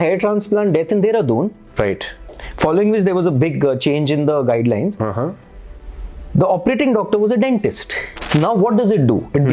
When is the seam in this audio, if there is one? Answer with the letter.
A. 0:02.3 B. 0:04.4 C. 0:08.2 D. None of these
C